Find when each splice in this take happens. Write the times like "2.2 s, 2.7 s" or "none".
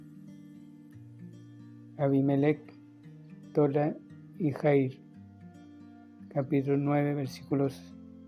5.0 s, 6.3 s